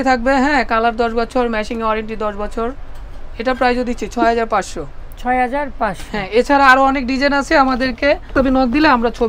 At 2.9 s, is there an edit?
no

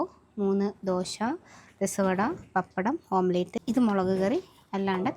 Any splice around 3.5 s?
yes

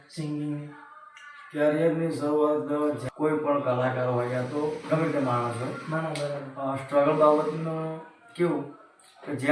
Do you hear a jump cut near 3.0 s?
yes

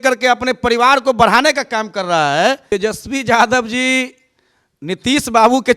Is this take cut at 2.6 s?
yes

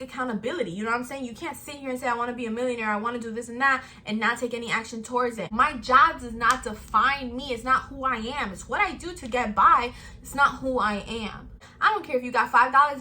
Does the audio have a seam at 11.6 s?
yes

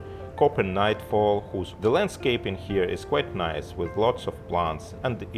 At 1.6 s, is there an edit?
yes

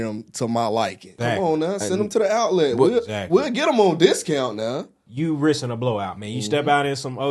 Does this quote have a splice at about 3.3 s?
no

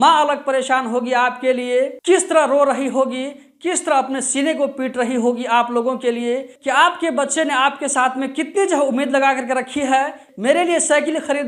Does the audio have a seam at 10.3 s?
yes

